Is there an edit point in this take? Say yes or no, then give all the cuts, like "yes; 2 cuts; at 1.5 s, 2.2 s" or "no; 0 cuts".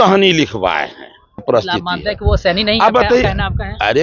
yes; 1 cut; at 1.4 s